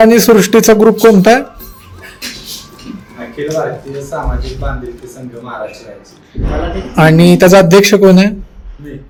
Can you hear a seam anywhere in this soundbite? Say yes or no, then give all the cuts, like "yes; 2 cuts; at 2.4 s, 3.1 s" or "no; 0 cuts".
no; 0 cuts